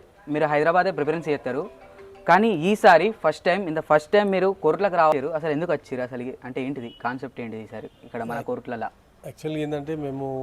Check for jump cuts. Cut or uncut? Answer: cut